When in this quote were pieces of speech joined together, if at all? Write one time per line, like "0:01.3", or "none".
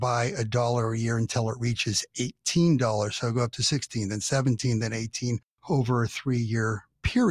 none